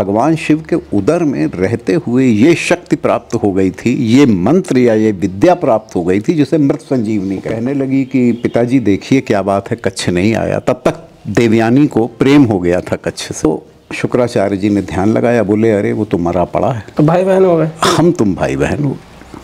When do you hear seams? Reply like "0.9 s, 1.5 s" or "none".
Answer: 7.5 s, 13.4 s, 16.8 s